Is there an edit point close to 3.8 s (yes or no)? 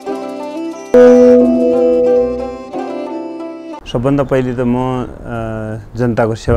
yes